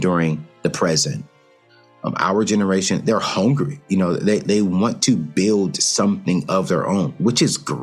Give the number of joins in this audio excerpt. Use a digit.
1